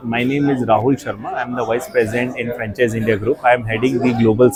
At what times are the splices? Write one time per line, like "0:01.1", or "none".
none